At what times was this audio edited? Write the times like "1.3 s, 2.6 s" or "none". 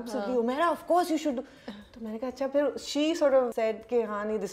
3.5 s